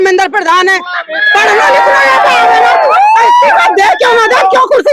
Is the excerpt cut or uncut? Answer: uncut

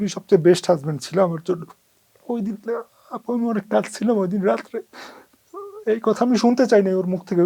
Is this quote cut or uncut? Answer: uncut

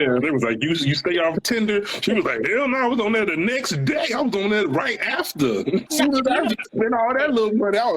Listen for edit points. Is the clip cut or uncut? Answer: cut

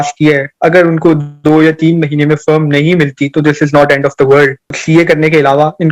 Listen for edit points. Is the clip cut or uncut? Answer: cut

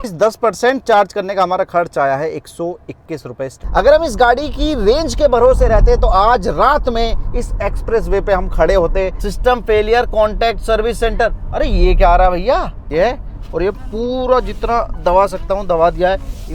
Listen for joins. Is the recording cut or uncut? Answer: cut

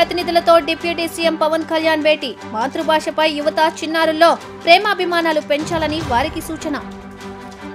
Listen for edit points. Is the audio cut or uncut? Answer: uncut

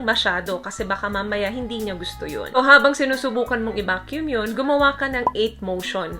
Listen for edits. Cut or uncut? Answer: cut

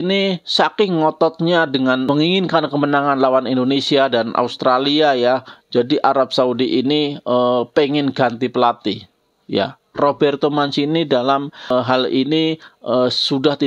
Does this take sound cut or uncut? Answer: cut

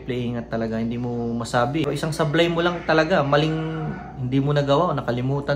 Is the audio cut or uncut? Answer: cut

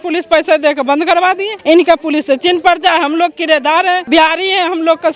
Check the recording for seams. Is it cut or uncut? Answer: cut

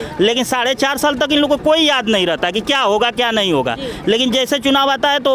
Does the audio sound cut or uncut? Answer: uncut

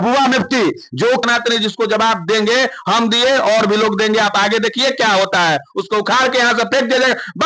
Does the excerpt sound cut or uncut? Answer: cut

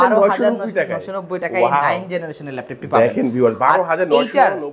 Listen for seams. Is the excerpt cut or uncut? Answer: uncut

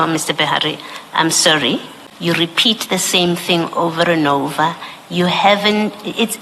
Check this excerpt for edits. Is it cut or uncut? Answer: cut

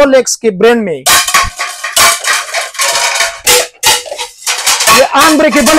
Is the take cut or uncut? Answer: cut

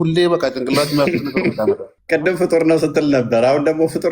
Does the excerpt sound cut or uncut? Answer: cut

